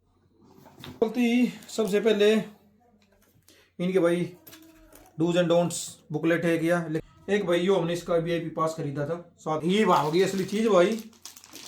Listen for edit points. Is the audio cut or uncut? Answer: cut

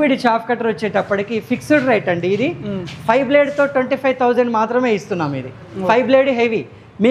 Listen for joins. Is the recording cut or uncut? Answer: uncut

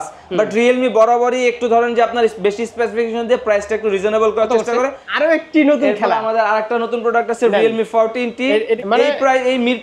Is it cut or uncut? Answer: cut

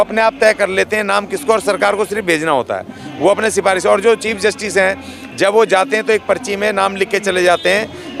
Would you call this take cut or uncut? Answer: uncut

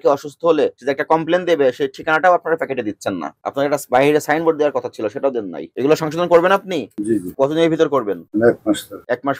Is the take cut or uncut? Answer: uncut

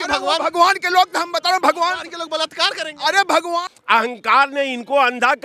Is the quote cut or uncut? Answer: cut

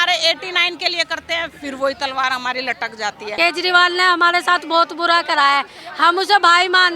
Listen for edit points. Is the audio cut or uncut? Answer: cut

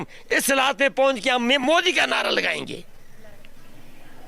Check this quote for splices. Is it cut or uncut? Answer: uncut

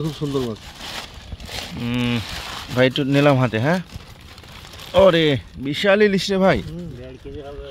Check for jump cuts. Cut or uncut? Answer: uncut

